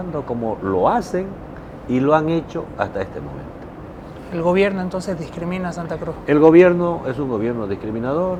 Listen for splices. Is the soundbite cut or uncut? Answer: uncut